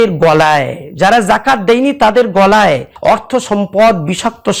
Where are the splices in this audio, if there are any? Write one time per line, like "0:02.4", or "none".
0:02.9